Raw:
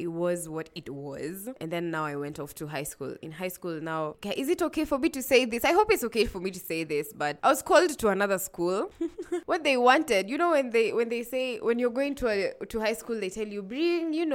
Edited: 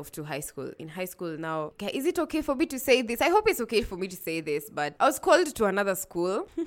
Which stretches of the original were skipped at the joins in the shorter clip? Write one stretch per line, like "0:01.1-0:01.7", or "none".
none

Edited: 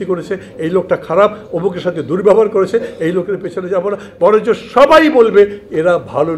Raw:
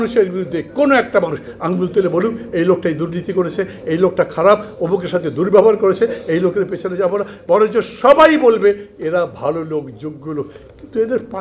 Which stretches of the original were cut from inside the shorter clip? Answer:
none

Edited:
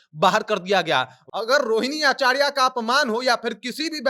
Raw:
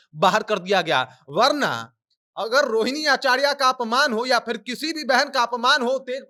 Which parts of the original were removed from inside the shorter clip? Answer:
0:01.2-0:02.2

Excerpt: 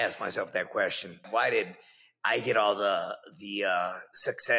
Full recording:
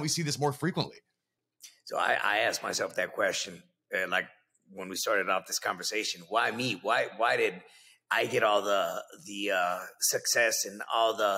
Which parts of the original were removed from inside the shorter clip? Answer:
0:03.7-0:07.1

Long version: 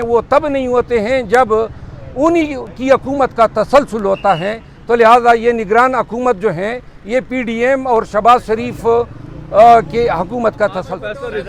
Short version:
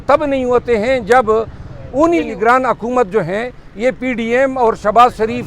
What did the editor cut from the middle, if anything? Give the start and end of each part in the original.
0:02.6-0:05.6

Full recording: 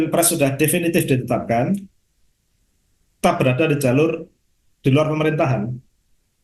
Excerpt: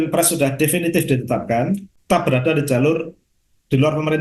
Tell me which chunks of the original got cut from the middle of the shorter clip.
0:01.9-0:03.1

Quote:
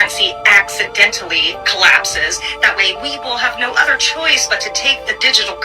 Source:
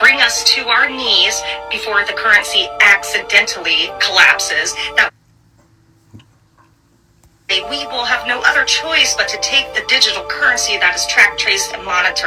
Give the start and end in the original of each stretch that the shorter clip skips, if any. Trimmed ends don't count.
0:05.1-0:07.5

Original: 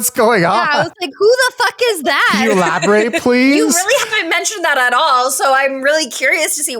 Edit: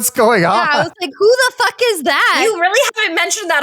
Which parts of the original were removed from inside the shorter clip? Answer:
0:02.4-0:03.6

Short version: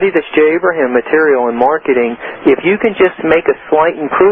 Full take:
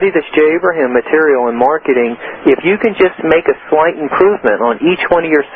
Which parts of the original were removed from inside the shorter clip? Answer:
none

